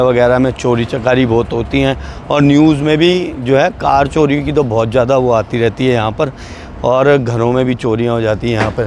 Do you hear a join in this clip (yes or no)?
no